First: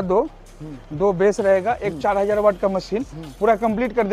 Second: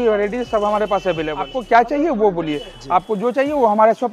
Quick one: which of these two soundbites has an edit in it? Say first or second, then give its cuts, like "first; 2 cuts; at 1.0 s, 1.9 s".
second; 1 cut; at 1.6 s